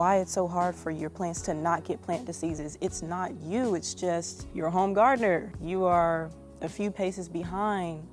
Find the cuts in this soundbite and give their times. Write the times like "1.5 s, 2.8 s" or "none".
4.4 s, 5.6 s